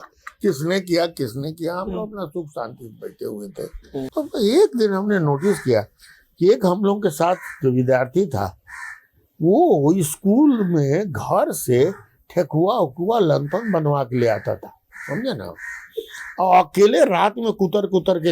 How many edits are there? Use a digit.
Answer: 1